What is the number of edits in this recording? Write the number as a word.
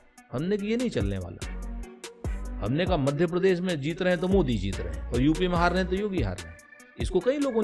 zero